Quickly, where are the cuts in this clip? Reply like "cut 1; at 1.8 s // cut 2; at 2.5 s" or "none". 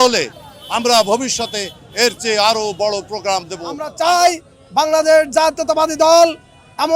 cut 1; at 3.7 s